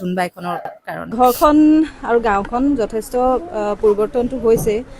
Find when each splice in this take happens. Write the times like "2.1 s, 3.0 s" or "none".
1.1 s